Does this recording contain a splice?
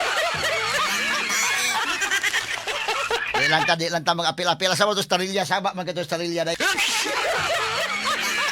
yes; 1 cut; at 2.7 s

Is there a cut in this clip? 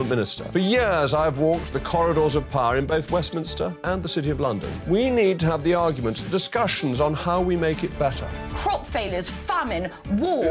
no; 0 cuts

